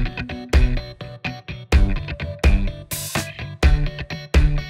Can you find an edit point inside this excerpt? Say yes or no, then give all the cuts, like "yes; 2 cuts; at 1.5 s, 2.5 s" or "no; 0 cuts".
yes; 1 cut; at 3.5 s